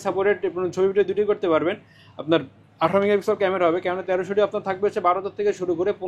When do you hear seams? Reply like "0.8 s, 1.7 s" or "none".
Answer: none